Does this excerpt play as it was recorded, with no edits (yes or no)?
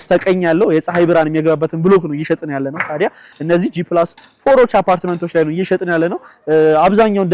no